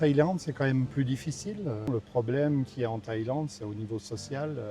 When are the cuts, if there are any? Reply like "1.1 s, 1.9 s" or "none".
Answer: 1.9 s